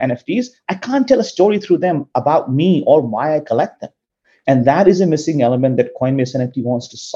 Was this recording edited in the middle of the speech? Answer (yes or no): no